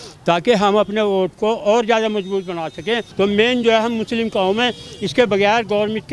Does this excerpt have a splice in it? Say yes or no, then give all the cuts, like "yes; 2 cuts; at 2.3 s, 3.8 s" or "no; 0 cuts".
yes; 1 cut; at 3.1 s